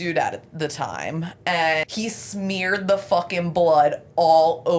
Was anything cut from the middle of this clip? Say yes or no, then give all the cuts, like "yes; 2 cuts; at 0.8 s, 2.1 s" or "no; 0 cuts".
yes; 1 cut; at 1.9 s